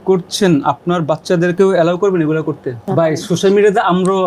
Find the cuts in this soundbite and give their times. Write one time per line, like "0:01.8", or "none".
0:02.9